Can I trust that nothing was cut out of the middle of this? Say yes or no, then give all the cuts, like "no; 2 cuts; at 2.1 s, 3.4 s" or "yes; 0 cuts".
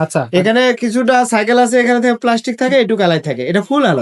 yes; 0 cuts